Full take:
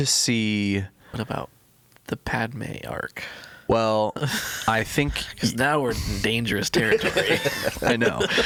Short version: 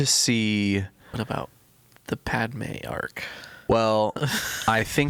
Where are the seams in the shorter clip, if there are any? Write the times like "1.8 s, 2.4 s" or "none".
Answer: none